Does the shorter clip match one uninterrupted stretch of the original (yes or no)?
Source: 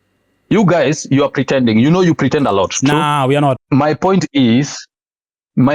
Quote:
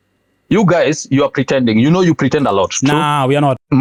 yes